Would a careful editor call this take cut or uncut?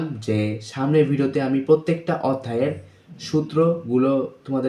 uncut